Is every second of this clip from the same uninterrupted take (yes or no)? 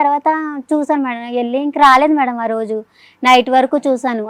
yes